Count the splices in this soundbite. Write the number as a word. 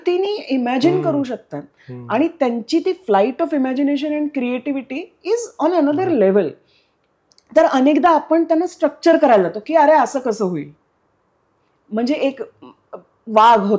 zero